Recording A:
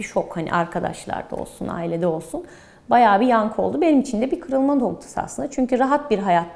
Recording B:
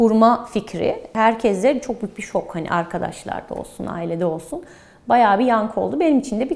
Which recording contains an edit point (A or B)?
B